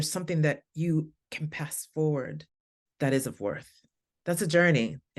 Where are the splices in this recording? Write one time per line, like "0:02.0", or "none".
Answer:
none